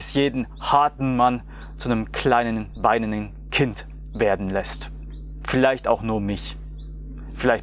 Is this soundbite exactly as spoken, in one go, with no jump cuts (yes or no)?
yes